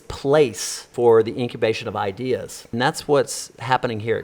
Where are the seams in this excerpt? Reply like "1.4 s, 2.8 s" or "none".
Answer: 0.9 s, 2.6 s